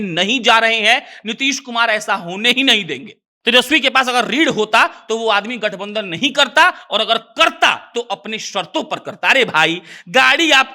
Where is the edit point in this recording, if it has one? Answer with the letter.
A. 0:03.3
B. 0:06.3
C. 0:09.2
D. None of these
A